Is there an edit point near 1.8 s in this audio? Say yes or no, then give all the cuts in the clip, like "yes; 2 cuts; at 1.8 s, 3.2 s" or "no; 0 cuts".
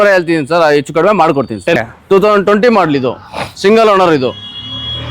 yes; 1 cut; at 1.8 s